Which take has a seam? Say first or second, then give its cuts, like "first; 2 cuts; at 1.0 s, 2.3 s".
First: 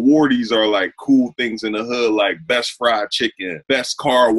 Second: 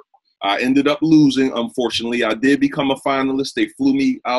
first; 1 cut; at 3.5 s